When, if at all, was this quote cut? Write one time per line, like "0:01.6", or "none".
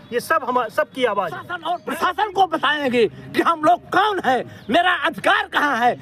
0:01.5